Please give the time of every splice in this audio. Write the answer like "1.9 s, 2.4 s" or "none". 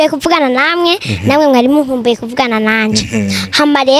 none